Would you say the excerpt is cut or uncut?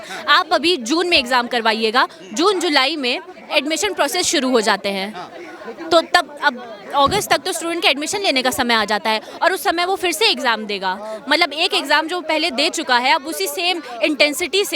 uncut